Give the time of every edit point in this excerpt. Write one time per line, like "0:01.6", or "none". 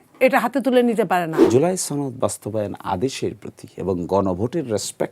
0:01.3